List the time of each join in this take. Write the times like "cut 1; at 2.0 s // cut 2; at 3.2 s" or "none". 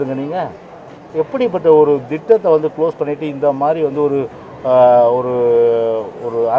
none